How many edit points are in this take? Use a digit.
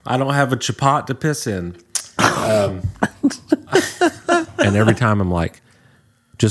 1